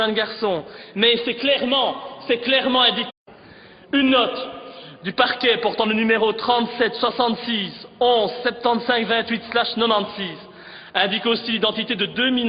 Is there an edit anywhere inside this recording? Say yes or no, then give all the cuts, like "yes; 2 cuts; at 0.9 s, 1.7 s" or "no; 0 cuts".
no; 0 cuts